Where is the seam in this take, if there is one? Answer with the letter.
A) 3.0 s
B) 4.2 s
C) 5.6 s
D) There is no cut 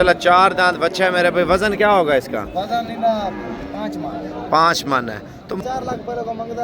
C